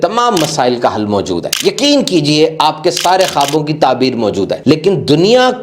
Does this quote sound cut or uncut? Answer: cut